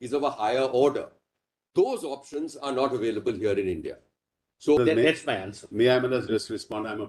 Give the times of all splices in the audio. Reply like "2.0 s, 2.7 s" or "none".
4.8 s